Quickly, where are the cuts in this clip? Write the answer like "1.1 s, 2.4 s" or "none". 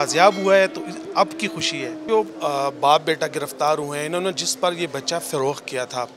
2.0 s

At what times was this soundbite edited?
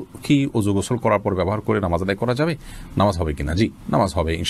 none

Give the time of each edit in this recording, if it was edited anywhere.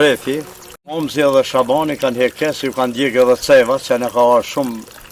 none

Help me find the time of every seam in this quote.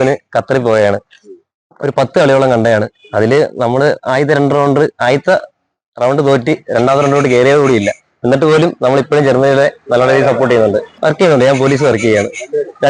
10.9 s

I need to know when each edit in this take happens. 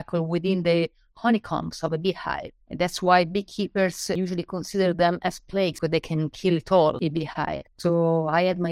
4.2 s, 5.8 s, 7.0 s

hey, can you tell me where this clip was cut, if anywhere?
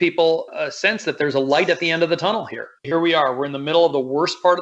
2.8 s

